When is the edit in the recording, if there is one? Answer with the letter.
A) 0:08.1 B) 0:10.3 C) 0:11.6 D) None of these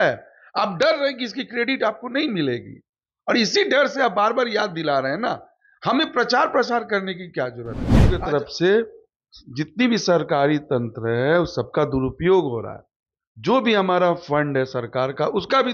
A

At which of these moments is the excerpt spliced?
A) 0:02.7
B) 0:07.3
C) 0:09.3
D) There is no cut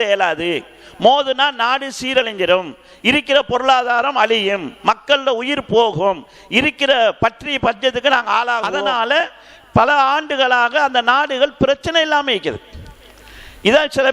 C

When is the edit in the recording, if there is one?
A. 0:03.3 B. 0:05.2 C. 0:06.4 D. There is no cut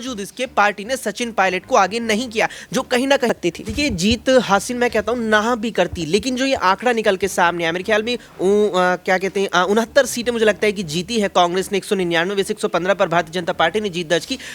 A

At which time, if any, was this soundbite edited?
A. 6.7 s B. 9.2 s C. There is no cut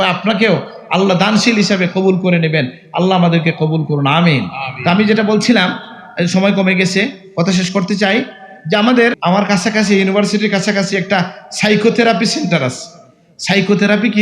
B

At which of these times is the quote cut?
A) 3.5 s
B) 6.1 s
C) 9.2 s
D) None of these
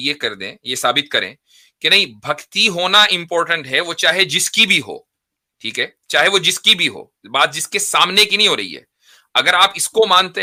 D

